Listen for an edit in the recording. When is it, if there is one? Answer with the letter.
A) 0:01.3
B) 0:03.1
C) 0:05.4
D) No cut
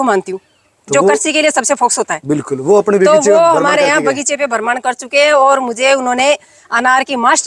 D